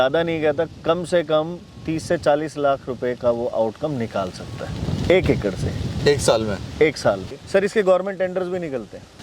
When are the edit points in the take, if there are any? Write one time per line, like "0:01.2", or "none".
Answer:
0:07.2